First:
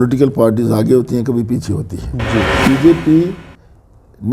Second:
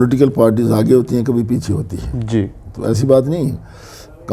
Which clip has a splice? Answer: first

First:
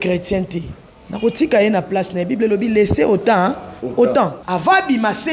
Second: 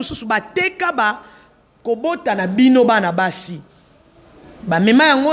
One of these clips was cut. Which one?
first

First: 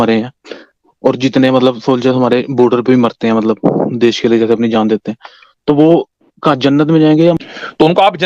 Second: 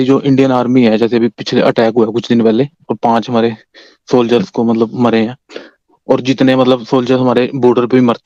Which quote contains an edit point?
first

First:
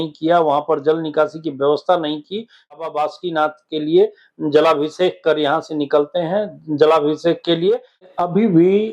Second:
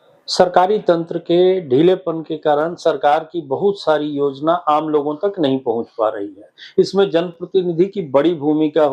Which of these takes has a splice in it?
first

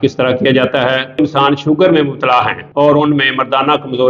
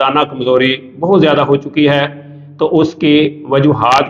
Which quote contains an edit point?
first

